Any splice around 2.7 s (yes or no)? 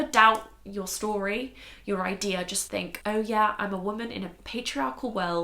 yes